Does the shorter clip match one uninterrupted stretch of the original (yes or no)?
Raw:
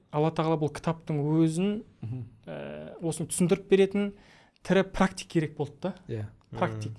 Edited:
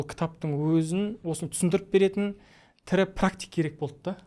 no